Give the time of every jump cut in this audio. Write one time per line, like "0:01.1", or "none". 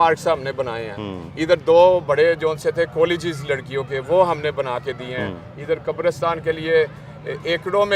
none